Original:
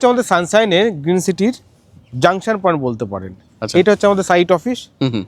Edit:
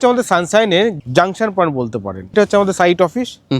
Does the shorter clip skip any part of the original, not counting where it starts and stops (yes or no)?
yes